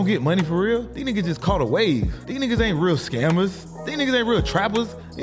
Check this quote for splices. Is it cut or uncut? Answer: cut